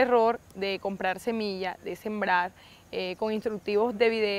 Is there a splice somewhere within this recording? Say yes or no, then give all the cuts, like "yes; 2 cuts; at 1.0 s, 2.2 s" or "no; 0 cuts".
no; 0 cuts